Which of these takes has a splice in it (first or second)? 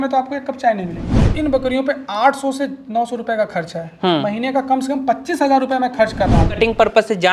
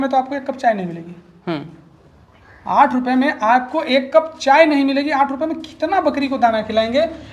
first